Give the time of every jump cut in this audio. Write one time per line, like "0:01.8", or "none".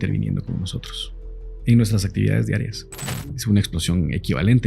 0:03.3